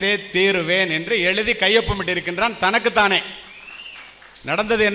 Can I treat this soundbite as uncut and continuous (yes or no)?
yes